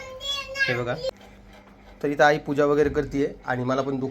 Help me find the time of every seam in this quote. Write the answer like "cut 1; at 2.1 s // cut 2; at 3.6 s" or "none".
cut 1; at 1.1 s